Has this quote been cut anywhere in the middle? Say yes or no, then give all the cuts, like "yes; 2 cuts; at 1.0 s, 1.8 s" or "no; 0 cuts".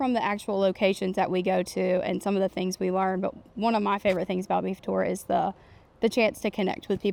no; 0 cuts